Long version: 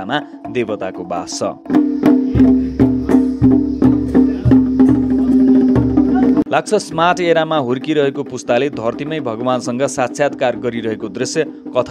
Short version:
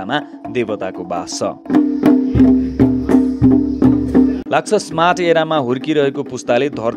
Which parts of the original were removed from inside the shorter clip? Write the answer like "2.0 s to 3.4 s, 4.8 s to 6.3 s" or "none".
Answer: 4.4 s to 6.5 s